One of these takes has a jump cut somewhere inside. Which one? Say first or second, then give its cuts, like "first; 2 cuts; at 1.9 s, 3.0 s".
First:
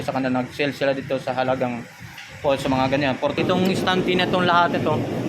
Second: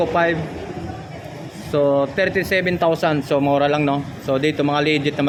first; 1 cut; at 3.2 s